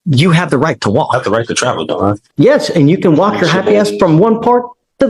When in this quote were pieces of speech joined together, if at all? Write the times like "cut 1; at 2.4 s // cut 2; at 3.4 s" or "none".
cut 1; at 2.2 s